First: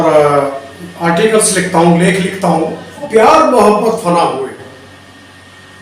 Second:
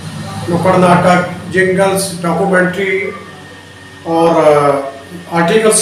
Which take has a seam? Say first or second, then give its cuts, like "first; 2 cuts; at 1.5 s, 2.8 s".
first; 1 cut; at 3.0 s